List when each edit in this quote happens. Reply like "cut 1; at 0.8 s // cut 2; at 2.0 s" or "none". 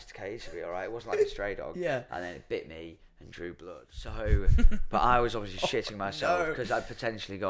cut 1; at 4.2 s